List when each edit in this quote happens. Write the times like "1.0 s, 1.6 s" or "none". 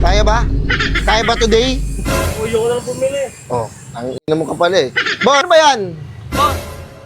5.4 s

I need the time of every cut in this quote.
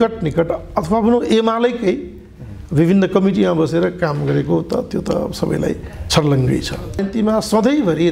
7.0 s

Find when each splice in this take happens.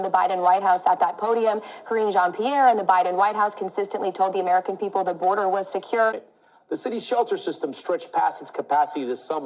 6.2 s

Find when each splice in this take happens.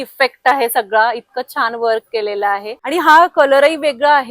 2.8 s

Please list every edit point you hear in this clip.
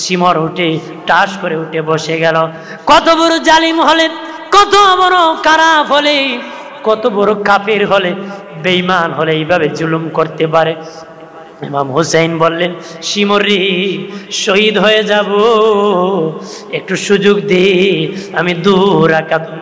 2.6 s

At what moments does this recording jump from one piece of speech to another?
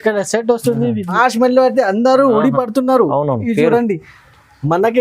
1.1 s

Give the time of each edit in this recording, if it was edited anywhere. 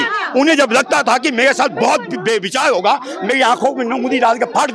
none

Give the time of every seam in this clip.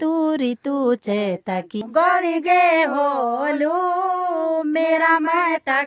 1.7 s

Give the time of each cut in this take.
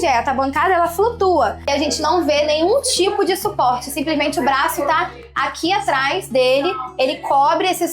1.6 s

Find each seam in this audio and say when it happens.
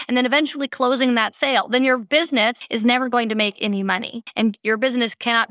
2.7 s, 4.2 s

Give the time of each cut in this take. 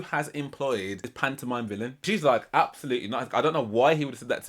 1.1 s, 2.0 s

